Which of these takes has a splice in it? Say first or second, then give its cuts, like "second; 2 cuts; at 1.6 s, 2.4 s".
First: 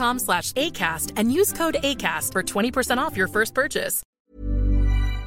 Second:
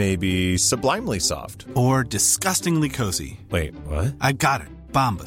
first; 1 cut; at 4.1 s